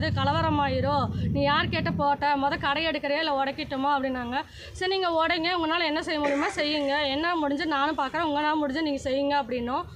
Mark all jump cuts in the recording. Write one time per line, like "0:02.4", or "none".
none